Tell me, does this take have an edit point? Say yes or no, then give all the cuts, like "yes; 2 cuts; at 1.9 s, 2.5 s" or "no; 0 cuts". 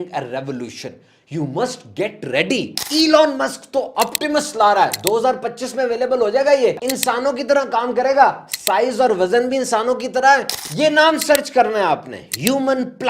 yes; 3 cuts; at 2.8 s, 6.9 s, 10.6 s